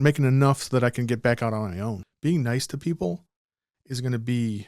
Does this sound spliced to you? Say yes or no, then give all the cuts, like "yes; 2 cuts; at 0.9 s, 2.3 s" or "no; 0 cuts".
yes; 1 cut; at 2.1 s